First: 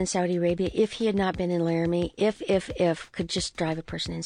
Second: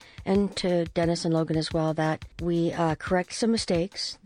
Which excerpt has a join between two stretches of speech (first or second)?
second